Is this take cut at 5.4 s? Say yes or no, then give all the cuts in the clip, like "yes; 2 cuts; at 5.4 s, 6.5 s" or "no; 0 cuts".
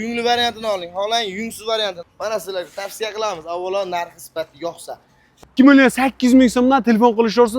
yes; 2 cuts; at 2.0 s, 5.4 s